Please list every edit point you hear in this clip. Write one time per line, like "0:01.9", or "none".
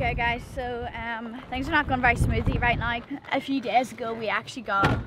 0:01.4
0:03.0